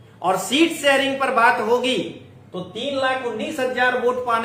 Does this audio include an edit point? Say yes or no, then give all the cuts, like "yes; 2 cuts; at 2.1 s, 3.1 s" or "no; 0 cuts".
no; 0 cuts